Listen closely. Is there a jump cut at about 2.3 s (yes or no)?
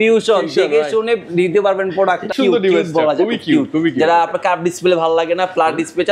yes